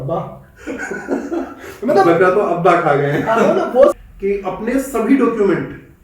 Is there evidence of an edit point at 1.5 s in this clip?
no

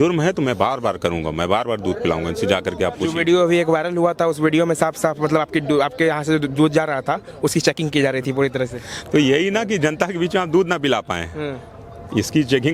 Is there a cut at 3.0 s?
no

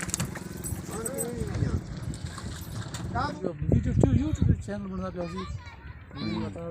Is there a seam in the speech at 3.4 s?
yes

